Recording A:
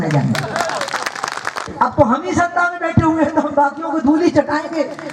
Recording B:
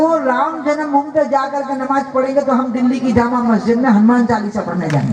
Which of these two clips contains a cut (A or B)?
A